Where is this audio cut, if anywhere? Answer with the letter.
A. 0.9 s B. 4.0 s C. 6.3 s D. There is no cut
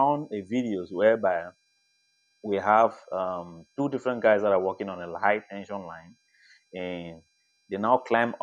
A